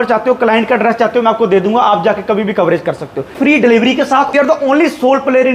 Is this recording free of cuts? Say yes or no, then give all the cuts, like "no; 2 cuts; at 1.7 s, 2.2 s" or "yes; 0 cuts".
no; 2 cuts; at 3.4 s, 4.3 s